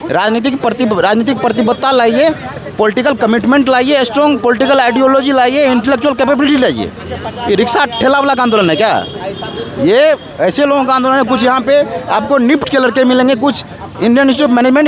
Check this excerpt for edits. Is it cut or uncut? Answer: uncut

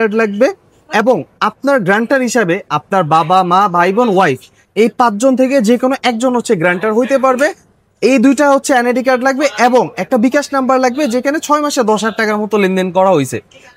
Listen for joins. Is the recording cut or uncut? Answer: uncut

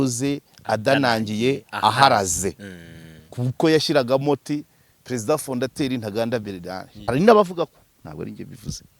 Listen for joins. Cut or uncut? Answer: cut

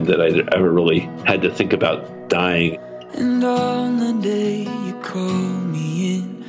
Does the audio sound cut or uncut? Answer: cut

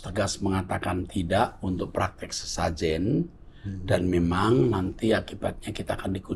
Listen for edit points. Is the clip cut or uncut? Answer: uncut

